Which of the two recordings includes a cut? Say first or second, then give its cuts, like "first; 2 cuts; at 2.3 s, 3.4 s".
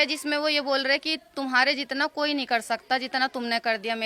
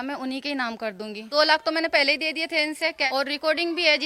second; 2 cuts; at 1.3 s, 3.0 s